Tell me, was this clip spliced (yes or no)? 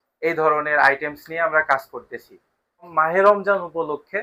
yes